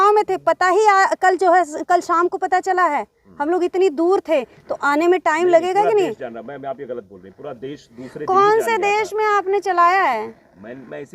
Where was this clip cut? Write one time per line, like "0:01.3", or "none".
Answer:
none